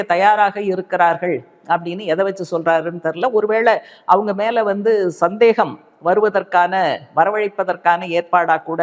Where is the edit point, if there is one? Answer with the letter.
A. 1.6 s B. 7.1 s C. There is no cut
C